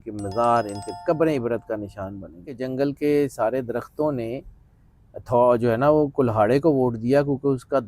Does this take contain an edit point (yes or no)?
yes